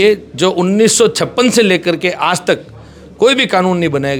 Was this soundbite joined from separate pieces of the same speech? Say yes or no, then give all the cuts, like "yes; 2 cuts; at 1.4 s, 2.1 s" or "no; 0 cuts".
no; 0 cuts